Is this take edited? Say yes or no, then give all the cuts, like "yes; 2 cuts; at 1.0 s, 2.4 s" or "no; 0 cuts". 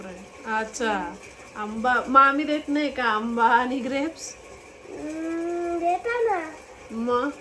no; 0 cuts